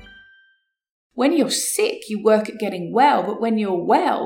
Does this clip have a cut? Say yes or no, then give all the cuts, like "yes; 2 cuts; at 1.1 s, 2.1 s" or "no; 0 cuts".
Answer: yes; 1 cut; at 1.0 s